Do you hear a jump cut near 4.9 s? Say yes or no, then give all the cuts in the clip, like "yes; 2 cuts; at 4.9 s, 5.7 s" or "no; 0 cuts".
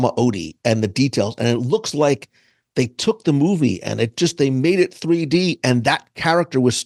no; 0 cuts